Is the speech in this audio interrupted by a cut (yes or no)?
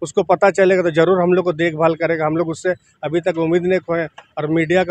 no